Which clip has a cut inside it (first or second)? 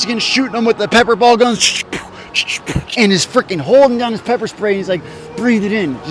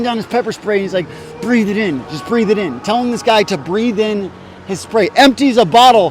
first